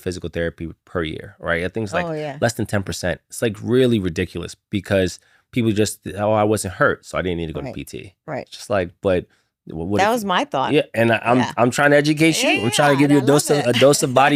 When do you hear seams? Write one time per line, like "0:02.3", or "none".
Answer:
none